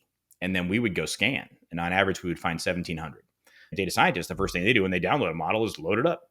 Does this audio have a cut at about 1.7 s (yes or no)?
no